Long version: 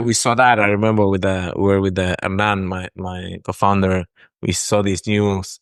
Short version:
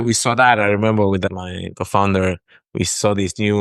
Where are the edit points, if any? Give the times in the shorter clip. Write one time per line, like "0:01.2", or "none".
0:01.3